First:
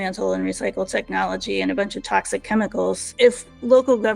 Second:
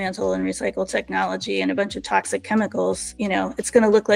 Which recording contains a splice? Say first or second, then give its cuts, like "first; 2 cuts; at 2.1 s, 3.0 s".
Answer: first; 1 cut; at 3.1 s